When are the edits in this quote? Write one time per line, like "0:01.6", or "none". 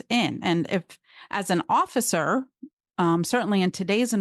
none